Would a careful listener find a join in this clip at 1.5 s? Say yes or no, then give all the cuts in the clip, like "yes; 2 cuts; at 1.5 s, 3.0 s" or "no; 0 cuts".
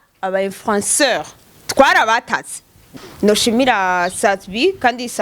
no; 1 cut; at 3.0 s